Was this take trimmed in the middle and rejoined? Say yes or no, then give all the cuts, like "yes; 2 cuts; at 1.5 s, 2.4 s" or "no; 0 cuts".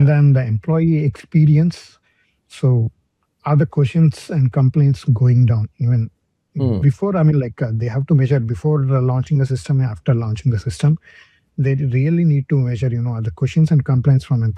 no; 0 cuts